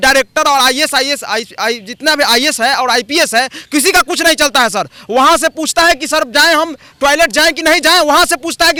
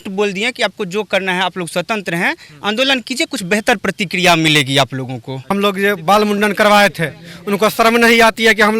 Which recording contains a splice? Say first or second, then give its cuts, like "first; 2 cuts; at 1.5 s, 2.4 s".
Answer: second; 1 cut; at 5.5 s